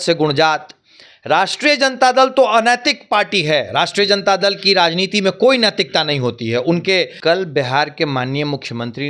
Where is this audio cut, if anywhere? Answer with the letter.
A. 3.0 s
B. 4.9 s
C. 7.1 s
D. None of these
C